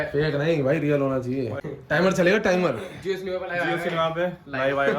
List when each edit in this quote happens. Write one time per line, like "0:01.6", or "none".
0:01.6

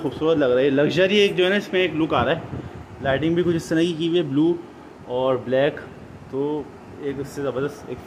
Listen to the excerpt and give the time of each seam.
none

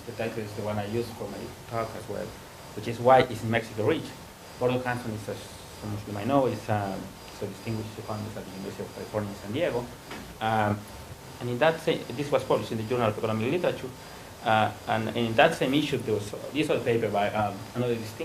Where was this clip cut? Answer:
0:14.5

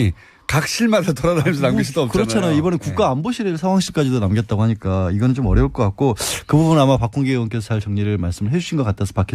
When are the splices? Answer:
0:01.9

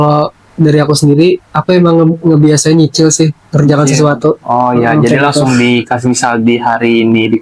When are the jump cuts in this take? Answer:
none

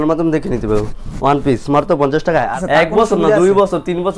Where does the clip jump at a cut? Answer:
0:02.5

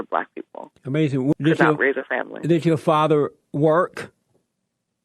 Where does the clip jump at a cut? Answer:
0:01.3

